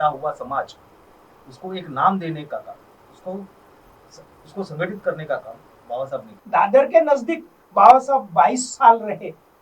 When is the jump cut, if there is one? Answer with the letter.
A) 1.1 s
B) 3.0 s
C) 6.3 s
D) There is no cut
C